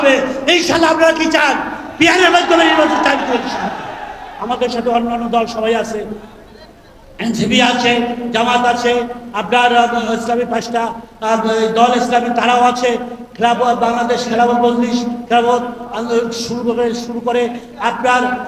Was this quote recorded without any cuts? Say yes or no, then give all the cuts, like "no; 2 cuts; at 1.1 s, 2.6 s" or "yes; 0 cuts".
yes; 0 cuts